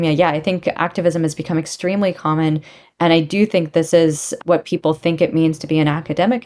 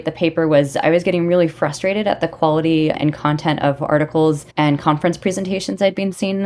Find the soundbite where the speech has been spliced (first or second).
second